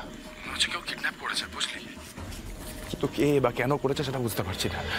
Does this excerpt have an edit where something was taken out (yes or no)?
no